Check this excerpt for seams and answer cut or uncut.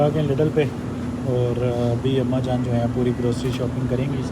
uncut